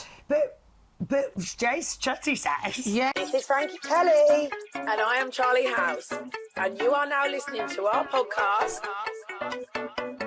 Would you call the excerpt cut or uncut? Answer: cut